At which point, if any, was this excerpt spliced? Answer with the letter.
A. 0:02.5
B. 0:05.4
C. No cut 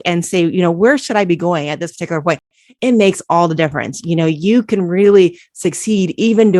C